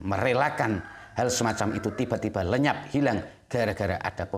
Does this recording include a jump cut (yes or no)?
no